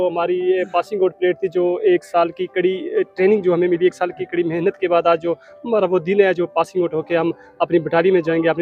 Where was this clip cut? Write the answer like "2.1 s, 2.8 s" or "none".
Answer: none